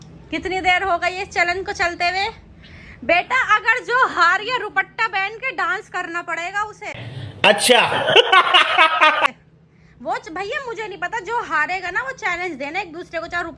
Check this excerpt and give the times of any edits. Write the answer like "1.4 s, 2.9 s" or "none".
none